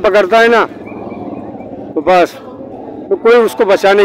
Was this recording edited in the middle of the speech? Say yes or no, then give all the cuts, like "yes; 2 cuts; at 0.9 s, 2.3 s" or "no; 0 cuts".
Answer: no; 0 cuts